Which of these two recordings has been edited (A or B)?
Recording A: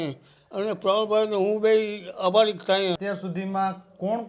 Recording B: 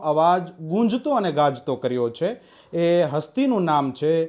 A